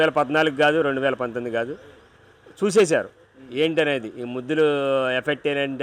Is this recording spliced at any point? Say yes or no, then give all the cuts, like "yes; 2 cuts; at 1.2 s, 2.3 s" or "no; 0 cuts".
no; 0 cuts